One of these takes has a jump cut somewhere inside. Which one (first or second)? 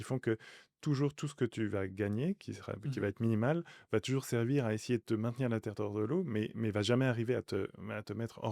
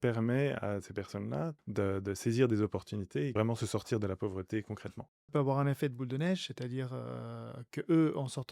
second